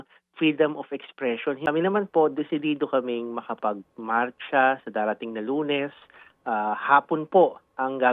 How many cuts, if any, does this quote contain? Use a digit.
1